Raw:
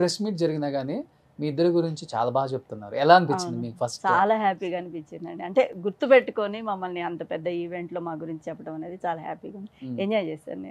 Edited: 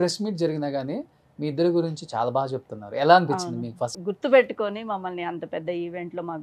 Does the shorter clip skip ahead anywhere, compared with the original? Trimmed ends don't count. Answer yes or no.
yes